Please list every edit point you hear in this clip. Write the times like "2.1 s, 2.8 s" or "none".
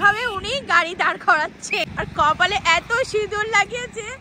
1.9 s

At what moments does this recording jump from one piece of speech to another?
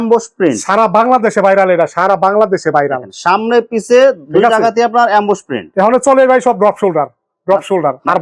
none

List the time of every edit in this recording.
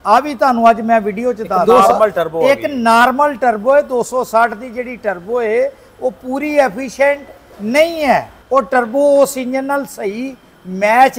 1.6 s, 8.4 s

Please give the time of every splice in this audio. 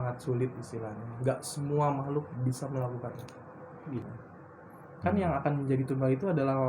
4.1 s

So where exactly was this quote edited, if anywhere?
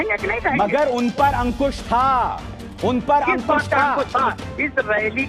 2.6 s

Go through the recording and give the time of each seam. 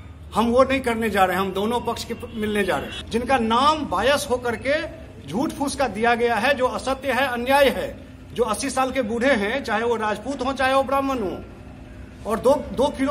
3.0 s

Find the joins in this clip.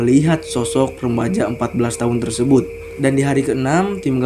2.8 s

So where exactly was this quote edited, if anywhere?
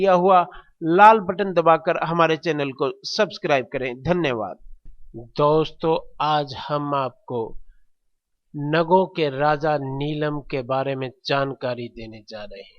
5.7 s

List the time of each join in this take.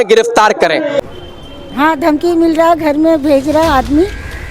1.0 s

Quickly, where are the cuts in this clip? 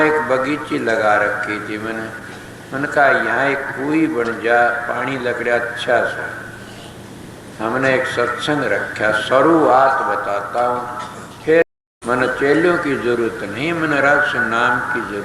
11.6 s

